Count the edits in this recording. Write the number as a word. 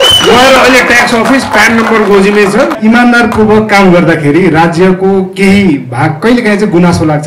one